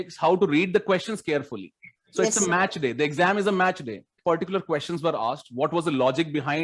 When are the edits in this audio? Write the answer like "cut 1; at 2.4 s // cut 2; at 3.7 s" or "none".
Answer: cut 1; at 4.2 s

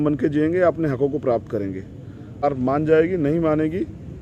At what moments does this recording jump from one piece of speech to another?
cut 1; at 2.4 s

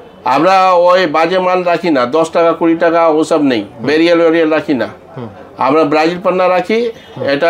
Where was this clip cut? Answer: none

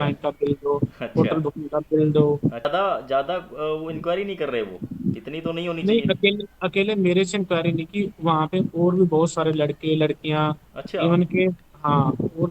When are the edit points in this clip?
cut 1; at 2.6 s

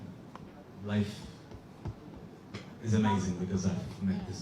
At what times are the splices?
none

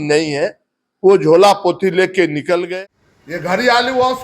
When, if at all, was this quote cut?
cut 1; at 2.7 s

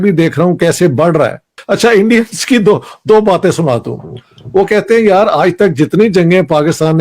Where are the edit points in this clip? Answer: none

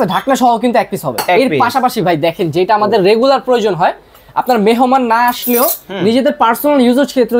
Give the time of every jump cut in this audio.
cut 1; at 1.2 s

